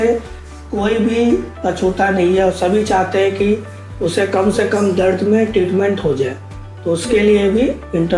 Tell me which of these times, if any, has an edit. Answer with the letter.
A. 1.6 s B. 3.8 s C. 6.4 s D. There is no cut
D